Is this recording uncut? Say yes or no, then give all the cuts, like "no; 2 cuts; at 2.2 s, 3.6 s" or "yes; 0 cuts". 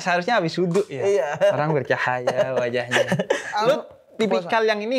no; 1 cut; at 3.5 s